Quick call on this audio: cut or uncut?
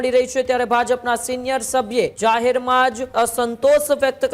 cut